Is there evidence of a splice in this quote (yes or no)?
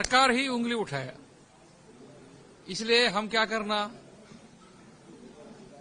no